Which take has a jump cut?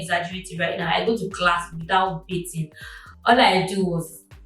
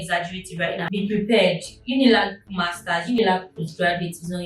second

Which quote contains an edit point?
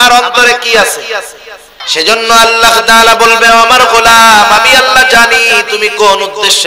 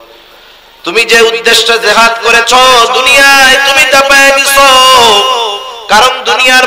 first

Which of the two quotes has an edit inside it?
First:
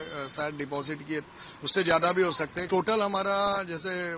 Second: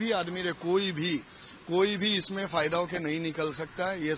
first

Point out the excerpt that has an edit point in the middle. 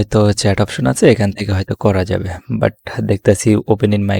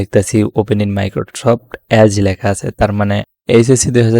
second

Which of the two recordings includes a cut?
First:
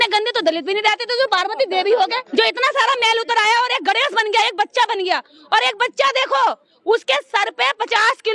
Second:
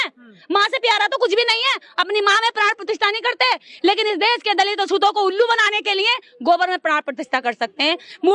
first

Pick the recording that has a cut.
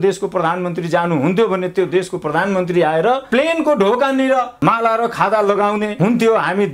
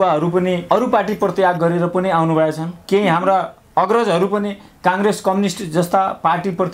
first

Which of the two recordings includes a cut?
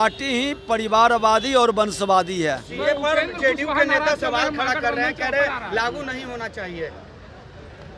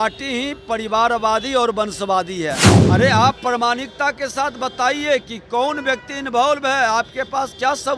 second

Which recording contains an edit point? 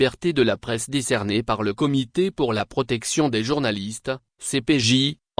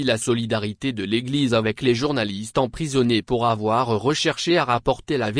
first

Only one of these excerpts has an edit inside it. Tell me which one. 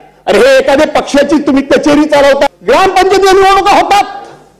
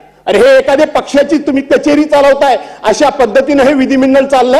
first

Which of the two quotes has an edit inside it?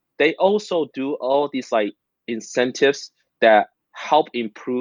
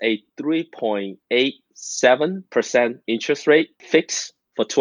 second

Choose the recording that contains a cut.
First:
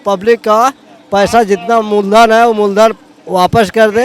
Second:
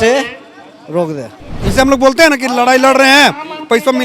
second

